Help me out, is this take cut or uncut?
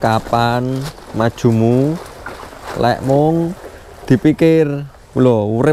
uncut